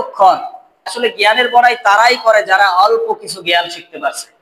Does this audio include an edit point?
yes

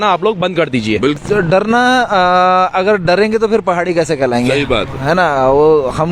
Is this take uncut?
no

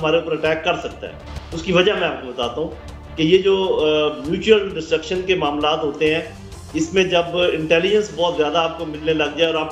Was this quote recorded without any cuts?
yes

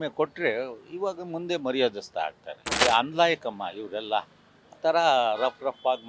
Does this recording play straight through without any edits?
no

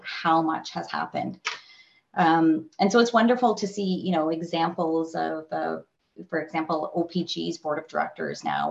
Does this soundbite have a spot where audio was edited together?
no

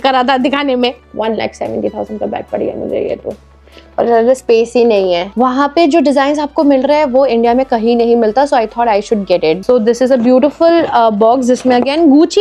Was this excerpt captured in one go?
no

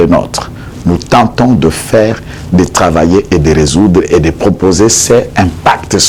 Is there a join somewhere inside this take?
no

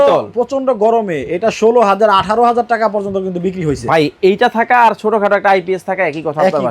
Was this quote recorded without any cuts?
yes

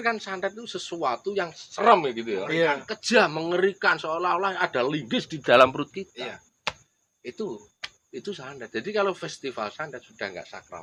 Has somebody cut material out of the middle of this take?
no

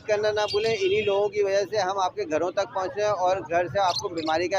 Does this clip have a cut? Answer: no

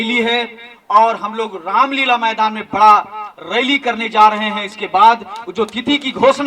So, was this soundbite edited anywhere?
no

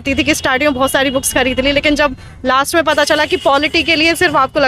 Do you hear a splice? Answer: no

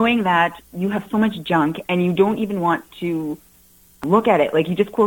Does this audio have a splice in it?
yes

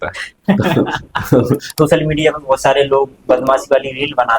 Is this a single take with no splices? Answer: no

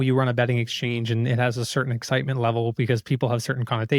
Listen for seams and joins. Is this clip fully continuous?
yes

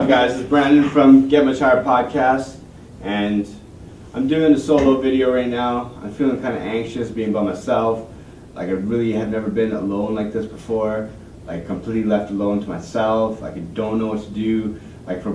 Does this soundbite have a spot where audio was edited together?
no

